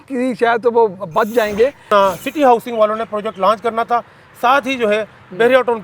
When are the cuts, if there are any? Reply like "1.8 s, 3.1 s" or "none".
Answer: 1.8 s